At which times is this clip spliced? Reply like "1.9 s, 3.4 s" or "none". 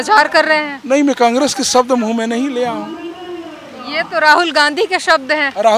none